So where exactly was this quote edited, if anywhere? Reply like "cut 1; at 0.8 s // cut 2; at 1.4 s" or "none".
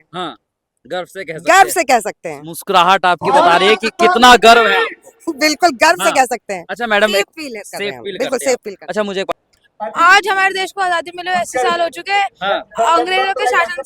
cut 1; at 9.3 s